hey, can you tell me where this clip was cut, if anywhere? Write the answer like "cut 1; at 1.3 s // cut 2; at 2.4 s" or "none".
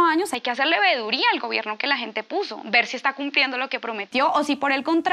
none